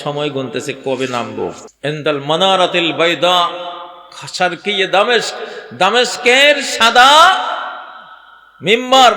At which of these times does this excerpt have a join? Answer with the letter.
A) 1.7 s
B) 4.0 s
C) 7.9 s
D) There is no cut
A